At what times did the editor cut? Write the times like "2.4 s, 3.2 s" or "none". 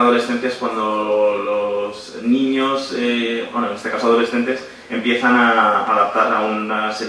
none